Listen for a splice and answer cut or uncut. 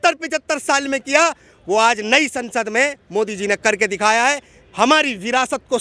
uncut